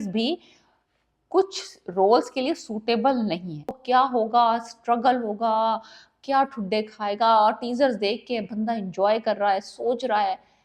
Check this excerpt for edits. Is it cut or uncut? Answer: cut